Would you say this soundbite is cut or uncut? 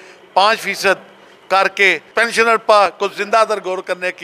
cut